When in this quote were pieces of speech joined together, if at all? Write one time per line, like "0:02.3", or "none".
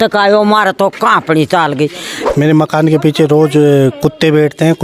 0:02.1